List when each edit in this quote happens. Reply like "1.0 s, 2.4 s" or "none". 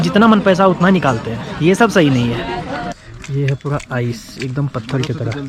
3.1 s